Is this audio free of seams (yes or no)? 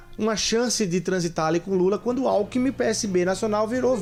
yes